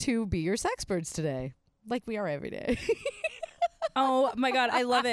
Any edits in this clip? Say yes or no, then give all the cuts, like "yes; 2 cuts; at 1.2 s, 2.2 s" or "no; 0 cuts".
no; 0 cuts